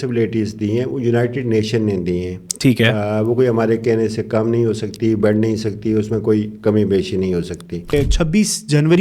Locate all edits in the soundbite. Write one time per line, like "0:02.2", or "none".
0:07.9